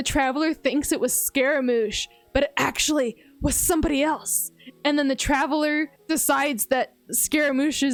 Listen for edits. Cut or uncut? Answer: uncut